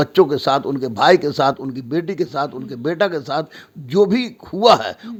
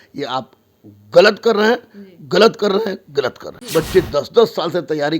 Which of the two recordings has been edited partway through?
second; 1 cut; at 3.6 s

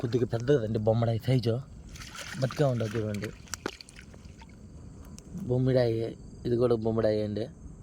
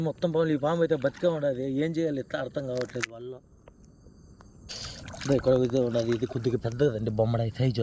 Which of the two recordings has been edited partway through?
second; 1 cut; at 4.7 s

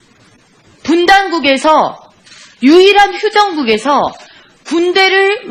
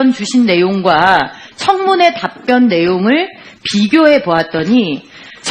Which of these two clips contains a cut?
second; 1 cut; at 4.6 s

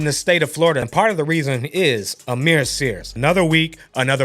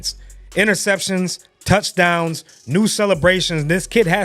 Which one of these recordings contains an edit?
first; 2 cuts; at 0.8 s, 3.1 s

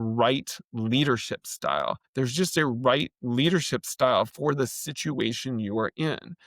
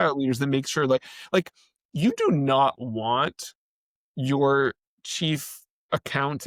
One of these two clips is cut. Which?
first; 1 cut; at 2.0 s

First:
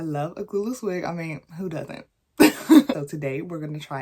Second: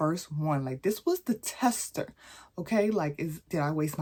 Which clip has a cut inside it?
first; 1 cut; at 3.0 s

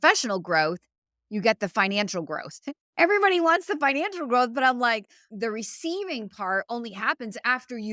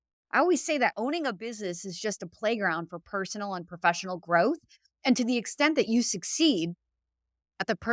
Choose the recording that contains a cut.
first; 1 cut; at 5.2 s

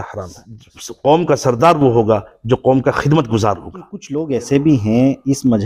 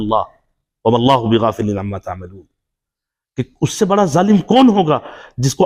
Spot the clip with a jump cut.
first; 2 cuts; at 0.9 s, 4.1 s

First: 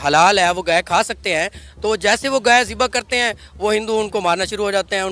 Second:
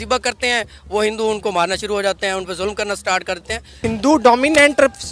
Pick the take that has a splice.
second; 1 cut; at 3.8 s

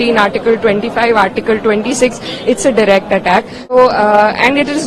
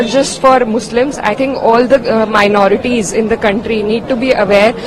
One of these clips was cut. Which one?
first; 1 cut; at 3.7 s

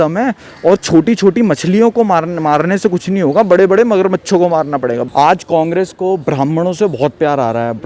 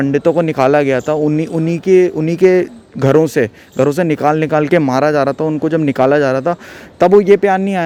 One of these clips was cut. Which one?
first; 1 cut; at 5.0 s

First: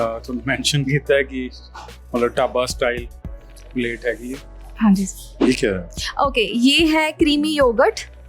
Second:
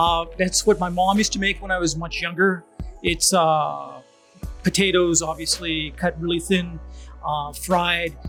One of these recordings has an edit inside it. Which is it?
first; 1 cut; at 5.4 s

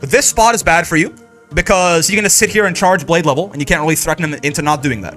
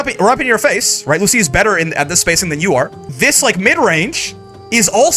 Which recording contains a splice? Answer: second; 1 cut; at 3.1 s

